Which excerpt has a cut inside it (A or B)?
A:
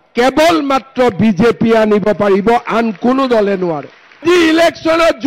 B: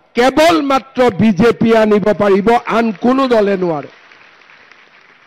A